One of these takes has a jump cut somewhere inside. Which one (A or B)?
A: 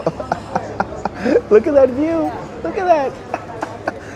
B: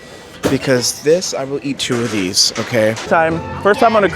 B